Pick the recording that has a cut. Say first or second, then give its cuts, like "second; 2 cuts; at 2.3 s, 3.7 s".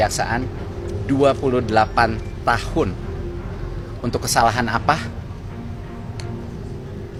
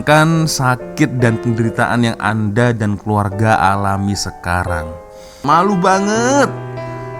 second; 1 cut; at 5.4 s